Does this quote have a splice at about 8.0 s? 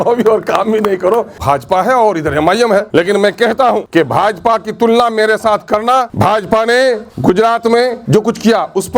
yes; 6 cuts; at 1.3 s, 2.9 s, 3.9 s, 6.1 s, 7.1 s, 8.0 s

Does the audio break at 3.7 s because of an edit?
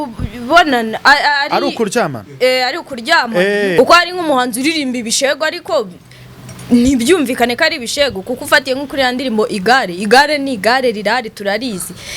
yes; 1 cut; at 3.7 s

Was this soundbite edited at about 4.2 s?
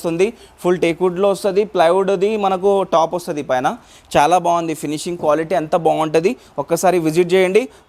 no; 0 cuts

